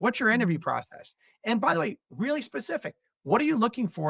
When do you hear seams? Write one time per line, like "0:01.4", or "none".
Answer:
none